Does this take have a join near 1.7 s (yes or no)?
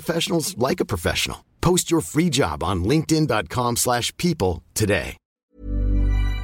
no